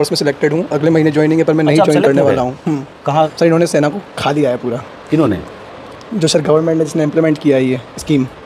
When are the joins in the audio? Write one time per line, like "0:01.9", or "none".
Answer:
0:03.3